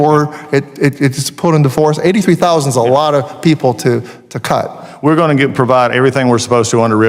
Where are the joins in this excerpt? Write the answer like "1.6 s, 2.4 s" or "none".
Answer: none